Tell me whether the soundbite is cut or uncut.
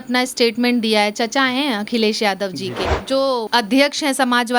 cut